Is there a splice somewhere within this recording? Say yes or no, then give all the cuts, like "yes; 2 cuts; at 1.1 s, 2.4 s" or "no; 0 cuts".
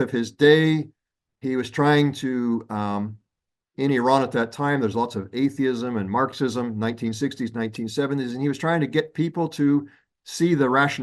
no; 0 cuts